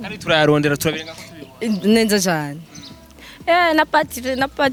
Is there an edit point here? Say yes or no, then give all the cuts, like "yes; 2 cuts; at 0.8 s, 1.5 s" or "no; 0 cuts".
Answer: no; 0 cuts